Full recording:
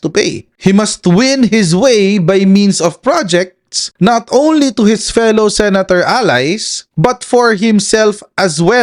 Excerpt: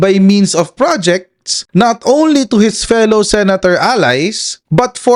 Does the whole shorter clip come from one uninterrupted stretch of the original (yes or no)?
yes